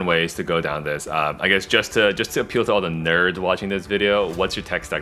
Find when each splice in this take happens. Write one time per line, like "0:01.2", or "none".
none